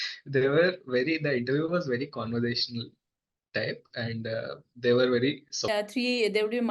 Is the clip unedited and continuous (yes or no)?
no